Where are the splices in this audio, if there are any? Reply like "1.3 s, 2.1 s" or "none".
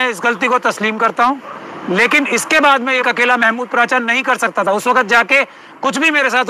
3.0 s